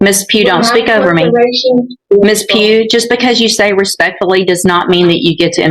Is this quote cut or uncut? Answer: cut